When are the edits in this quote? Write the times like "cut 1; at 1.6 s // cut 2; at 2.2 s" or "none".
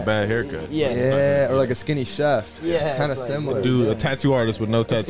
none